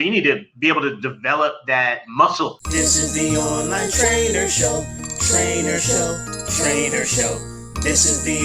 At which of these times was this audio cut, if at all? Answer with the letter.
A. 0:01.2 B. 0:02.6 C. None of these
B